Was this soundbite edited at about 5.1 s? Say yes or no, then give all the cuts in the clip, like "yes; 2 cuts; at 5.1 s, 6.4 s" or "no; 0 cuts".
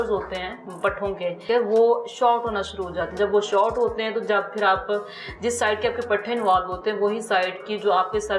no; 1 cut; at 1.4 s